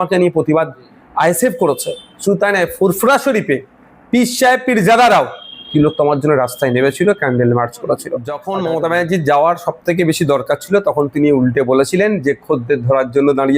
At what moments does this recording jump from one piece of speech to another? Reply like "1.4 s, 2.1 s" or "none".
8.4 s